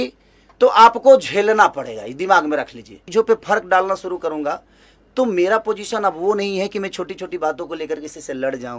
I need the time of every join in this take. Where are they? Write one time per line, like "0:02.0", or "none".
0:03.0